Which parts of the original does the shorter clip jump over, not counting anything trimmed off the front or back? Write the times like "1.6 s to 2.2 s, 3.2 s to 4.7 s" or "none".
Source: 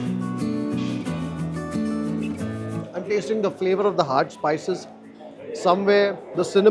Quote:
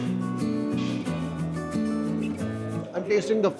none